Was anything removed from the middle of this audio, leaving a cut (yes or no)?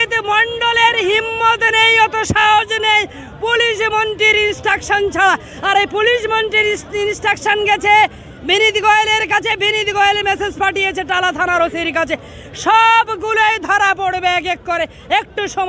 no